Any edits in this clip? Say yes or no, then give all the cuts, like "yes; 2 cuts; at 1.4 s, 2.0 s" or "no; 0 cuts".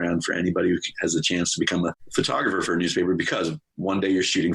yes; 1 cut; at 2.0 s